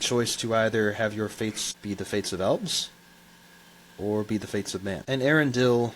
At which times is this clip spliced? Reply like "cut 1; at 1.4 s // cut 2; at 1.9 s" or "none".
cut 1; at 1.7 s // cut 2; at 5.0 s